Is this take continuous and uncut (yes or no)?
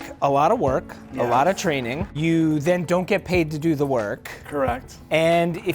no